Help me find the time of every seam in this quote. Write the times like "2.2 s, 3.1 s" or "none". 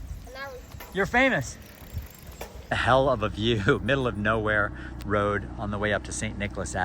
2.6 s